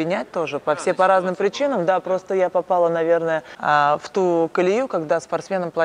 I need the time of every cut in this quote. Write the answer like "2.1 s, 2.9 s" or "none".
3.5 s